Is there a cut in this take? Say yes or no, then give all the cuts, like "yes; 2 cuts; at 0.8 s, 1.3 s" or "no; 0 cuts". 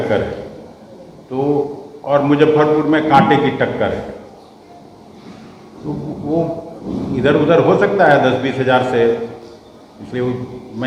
no; 0 cuts